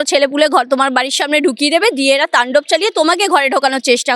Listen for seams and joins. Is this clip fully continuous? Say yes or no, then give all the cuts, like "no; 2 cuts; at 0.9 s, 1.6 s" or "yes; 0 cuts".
yes; 0 cuts